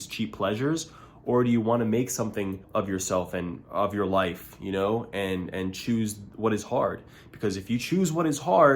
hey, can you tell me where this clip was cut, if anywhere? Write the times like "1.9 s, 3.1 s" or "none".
2.6 s